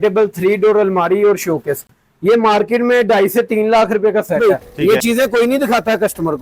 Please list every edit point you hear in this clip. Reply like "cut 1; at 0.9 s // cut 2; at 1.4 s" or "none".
cut 1; at 4.4 s